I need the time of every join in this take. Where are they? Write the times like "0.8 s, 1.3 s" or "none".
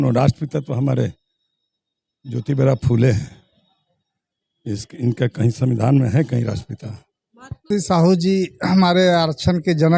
7.7 s